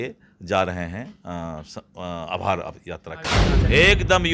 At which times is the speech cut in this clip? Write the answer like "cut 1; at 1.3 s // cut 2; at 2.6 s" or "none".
cut 1; at 3.4 s